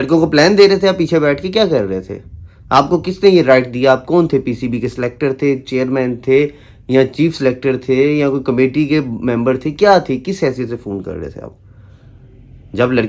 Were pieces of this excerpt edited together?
no; 0 cuts

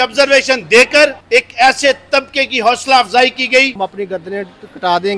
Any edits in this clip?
yes; 2 cuts; at 1.2 s, 3.8 s

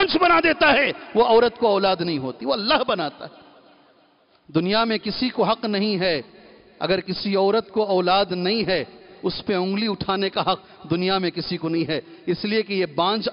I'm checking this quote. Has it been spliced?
no; 0 cuts

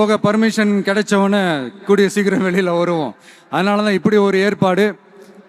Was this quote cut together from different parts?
no; 0 cuts

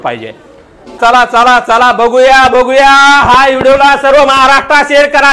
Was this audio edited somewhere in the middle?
yes; 1 cut; at 1.0 s

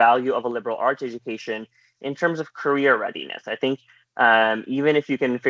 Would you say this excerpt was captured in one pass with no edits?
yes; 0 cuts

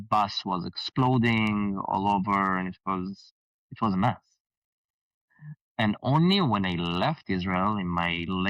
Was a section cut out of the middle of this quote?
no; 0 cuts

